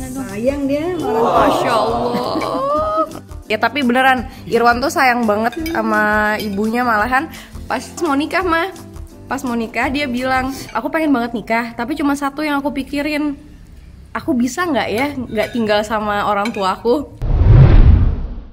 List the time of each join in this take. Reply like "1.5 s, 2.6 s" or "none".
none

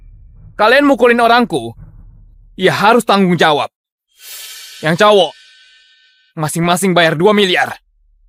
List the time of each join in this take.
none

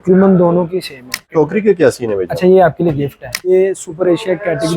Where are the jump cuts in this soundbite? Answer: 1.3 s, 3.5 s

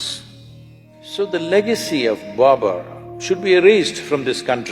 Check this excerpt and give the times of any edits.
1.0 s

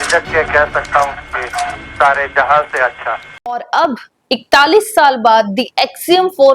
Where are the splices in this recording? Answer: 3.5 s

